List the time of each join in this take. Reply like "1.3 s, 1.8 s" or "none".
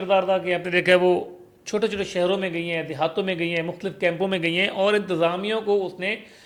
none